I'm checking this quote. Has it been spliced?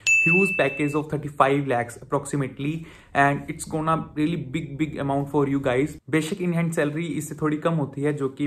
no; 0 cuts

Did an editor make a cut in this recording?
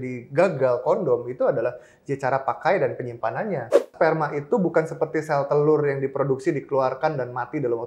yes; 1 cut; at 3.9 s

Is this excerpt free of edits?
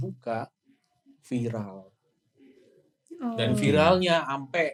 yes; 0 cuts

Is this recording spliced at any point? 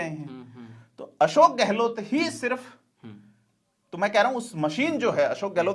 no; 0 cuts

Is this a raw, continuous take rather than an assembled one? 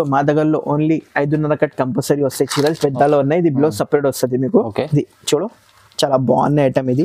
yes; 0 cuts

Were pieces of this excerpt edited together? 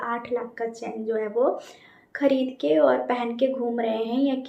no; 0 cuts

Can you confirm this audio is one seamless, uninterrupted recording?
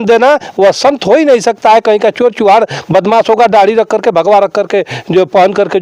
yes; 0 cuts

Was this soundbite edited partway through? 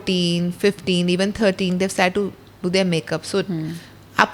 no; 0 cuts

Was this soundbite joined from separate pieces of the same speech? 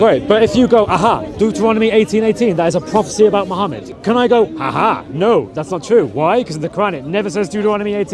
yes; 1 cut; at 3.9 s

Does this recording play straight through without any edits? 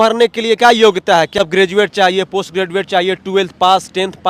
yes; 0 cuts

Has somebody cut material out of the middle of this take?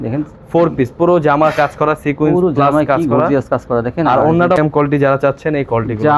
yes; 1 cut; at 4.6 s

